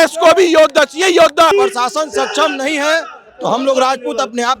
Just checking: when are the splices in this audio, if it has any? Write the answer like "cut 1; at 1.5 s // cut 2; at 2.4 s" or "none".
cut 1; at 1.5 s

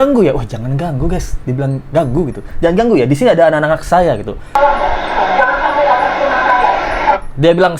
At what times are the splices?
none

